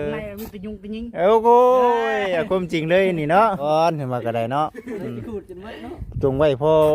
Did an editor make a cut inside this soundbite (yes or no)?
yes